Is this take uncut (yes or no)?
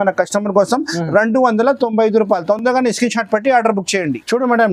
yes